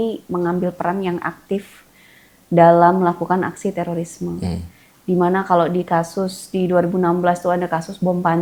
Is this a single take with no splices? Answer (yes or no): yes